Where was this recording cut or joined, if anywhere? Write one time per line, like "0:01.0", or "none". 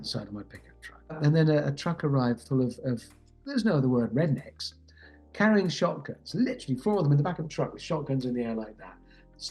0:01.2